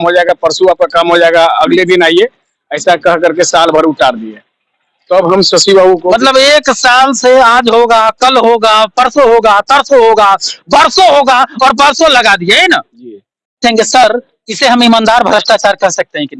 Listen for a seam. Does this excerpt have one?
yes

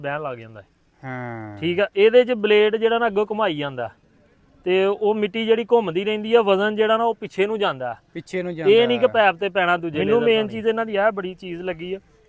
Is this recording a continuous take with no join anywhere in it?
no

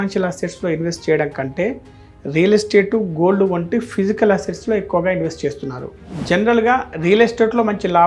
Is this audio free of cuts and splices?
no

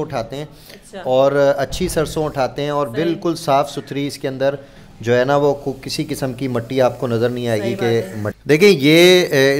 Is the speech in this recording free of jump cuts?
no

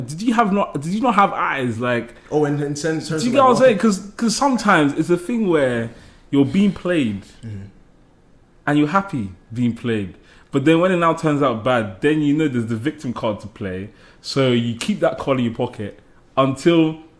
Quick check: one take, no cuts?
yes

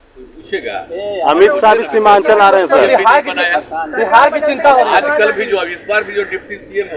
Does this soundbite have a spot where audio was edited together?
no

